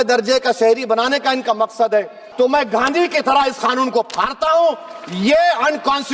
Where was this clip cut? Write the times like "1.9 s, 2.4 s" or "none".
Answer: 2.2 s